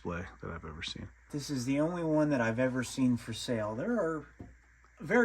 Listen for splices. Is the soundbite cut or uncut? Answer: cut